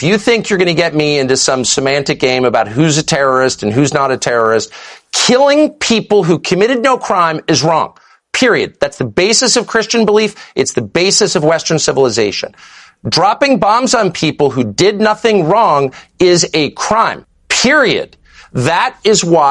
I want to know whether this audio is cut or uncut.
uncut